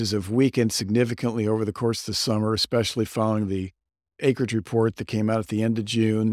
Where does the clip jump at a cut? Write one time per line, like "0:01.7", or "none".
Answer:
none